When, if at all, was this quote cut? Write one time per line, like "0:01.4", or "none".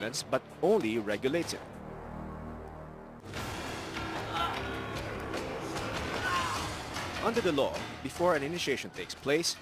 none